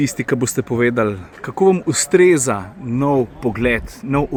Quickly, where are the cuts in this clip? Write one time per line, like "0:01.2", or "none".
none